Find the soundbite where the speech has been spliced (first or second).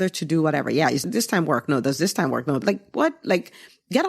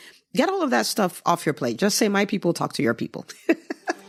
first